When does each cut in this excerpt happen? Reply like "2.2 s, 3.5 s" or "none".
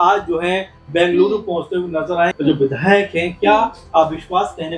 2.3 s